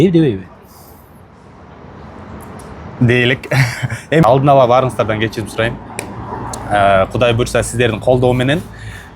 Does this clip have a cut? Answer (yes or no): yes